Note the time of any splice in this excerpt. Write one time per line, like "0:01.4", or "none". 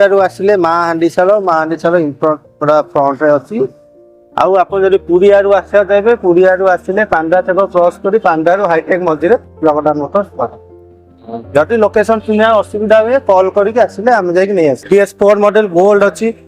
0:14.8